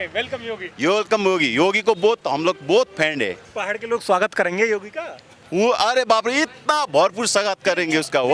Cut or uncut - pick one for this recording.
cut